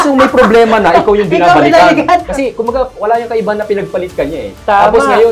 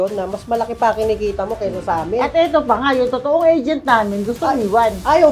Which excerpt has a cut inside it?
first; 1 cut; at 2.3 s

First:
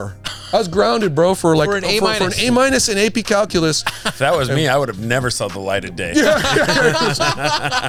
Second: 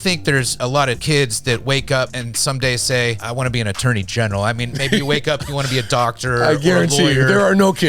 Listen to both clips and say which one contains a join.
second; 3 cuts; at 0.8 s, 2.2 s, 3.2 s

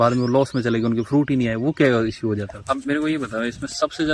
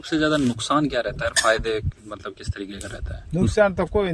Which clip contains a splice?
first; 1 cut; at 2.5 s

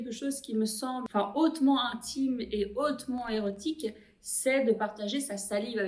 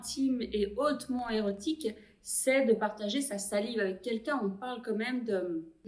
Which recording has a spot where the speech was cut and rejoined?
first; 1 cut; at 1.1 s

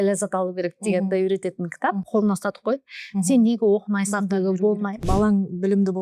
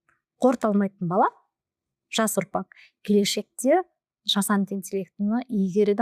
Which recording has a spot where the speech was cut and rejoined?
first; 2 cuts; at 2.0 s, 5.0 s

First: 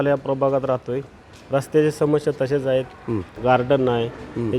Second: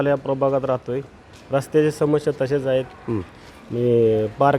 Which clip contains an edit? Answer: first; 1 cut; at 3.3 s

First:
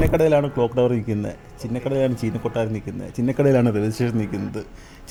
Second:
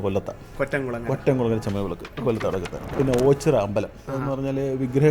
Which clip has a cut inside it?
second; 2 cuts; at 2.8 s, 4.0 s

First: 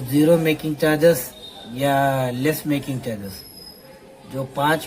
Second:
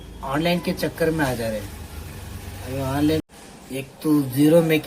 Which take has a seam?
second; 1 cut; at 3.2 s

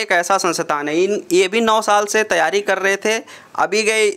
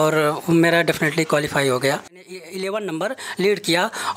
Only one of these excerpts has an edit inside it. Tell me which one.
second; 1 cut; at 2.4 s

